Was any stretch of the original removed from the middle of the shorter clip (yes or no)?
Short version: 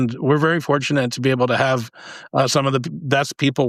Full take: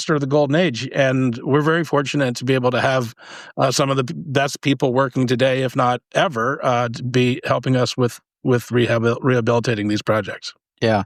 no